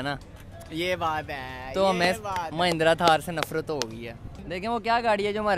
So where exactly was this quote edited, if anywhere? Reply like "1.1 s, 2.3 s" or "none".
4.3 s